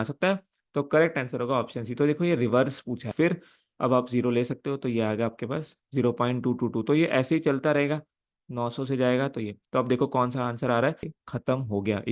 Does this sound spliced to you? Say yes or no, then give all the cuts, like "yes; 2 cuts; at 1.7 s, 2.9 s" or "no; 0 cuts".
yes; 2 cuts; at 3.1 s, 11.2 s